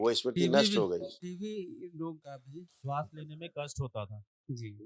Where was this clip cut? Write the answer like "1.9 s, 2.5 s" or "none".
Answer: 1.2 s, 2.3 s